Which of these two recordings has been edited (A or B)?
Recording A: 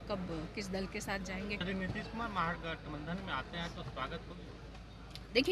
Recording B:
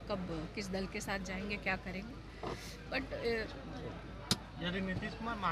A